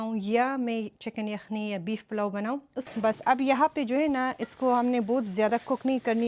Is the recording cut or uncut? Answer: cut